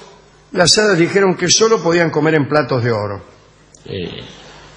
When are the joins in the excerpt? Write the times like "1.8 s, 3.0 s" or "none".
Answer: 3.2 s